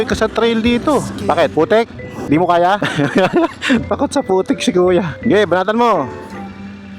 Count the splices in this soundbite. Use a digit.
1